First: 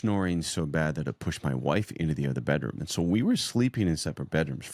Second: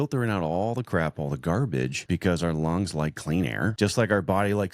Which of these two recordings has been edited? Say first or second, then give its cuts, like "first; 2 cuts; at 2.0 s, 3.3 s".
second; 2 cuts; at 2.0 s, 3.7 s